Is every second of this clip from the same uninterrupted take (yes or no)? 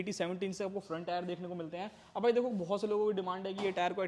yes